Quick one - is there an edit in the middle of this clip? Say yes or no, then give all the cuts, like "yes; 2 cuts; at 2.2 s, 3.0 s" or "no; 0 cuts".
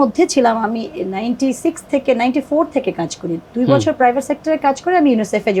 no; 0 cuts